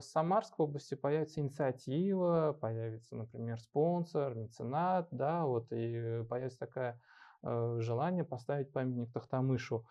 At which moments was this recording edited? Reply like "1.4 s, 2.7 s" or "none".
none